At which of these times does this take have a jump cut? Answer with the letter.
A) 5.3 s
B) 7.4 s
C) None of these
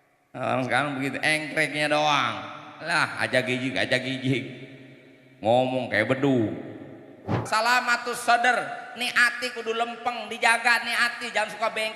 B